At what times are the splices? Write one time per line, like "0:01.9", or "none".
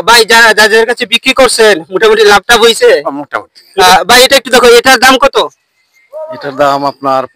0:03.6